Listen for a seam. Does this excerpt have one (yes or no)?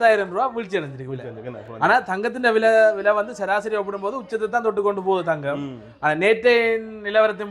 no